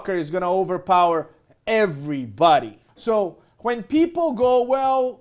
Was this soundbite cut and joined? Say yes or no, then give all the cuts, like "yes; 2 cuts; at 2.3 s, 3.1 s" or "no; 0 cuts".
yes; 1 cut; at 2.8 s